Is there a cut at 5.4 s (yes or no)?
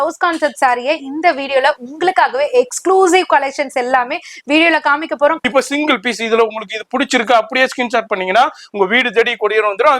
yes